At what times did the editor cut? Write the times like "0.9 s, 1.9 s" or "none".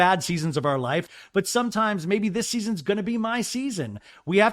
1.0 s